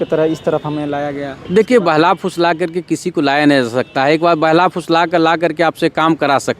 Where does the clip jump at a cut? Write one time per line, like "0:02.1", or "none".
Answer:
none